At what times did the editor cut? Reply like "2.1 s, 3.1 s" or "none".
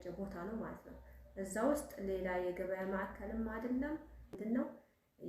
4.4 s